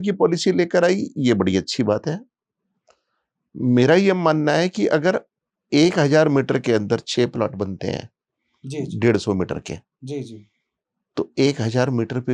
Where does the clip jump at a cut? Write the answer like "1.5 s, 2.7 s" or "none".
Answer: none